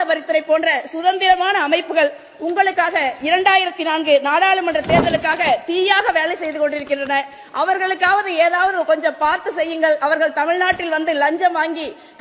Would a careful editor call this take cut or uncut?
uncut